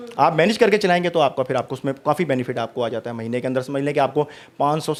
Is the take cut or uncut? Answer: uncut